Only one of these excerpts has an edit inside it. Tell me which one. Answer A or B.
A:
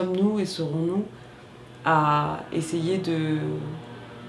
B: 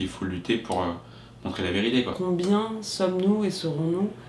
B